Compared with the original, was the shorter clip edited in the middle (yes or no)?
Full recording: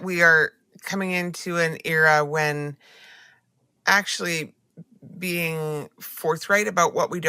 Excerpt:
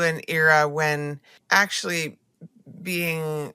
yes